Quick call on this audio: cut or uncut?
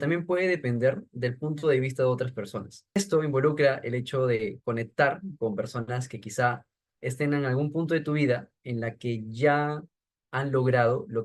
cut